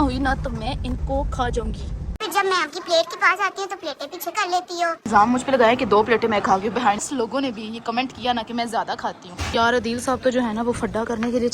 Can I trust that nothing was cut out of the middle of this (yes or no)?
no